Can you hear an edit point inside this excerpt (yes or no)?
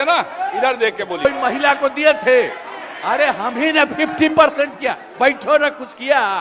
yes